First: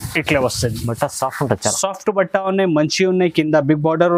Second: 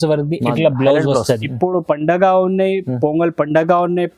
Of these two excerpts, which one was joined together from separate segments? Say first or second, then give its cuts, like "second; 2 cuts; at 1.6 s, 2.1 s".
second; 1 cut; at 1.5 s